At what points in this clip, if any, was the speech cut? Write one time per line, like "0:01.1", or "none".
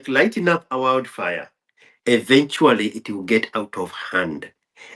none